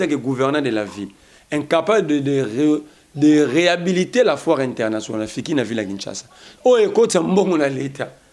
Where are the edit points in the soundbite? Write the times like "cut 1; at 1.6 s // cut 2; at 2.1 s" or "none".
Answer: none